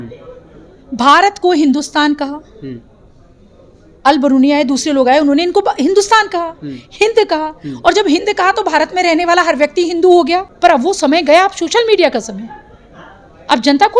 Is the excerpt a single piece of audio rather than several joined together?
no; 1 cut; at 10.5 s

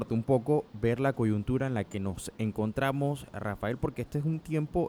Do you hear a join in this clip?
no; 0 cuts

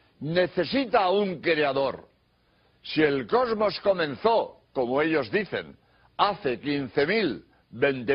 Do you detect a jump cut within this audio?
yes; 1 cut; at 4.2 s

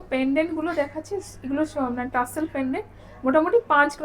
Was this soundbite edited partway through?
no; 0 cuts

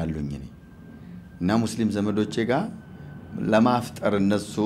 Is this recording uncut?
yes; 0 cuts

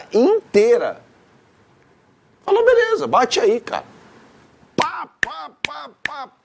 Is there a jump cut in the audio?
no; 0 cuts

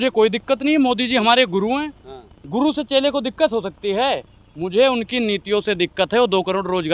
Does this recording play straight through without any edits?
yes; 0 cuts

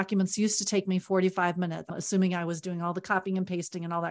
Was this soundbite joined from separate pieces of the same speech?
yes; 1 cut; at 2.0 s

